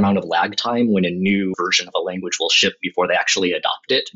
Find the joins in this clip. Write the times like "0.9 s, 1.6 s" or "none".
1.5 s